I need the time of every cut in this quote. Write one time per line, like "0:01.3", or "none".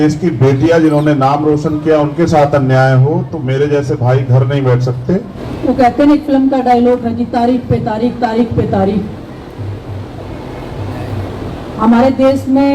0:05.4